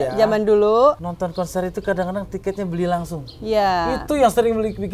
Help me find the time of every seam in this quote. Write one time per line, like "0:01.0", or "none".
0:01.1